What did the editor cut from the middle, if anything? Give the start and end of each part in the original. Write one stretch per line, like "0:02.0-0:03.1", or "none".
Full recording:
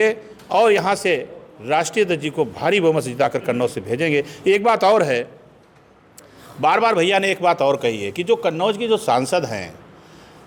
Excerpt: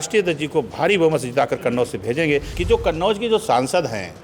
0:04.3-0:08.1